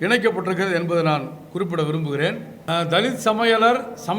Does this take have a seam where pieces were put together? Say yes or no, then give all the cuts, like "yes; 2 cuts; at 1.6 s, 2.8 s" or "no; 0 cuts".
yes; 1 cut; at 2.5 s